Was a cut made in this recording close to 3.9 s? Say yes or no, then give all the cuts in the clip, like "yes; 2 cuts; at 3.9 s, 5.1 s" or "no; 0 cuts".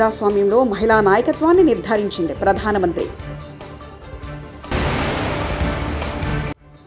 no; 0 cuts